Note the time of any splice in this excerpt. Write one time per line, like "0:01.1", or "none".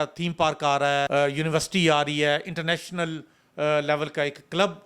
0:01.1